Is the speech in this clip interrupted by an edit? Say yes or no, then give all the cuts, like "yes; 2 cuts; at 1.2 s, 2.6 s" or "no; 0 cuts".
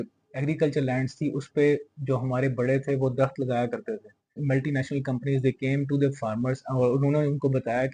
yes; 1 cut; at 4.4 s